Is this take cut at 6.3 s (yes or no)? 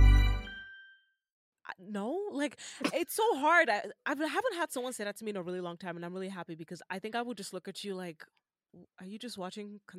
no